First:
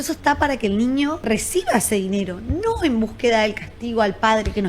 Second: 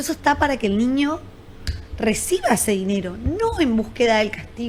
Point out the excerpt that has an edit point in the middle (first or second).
first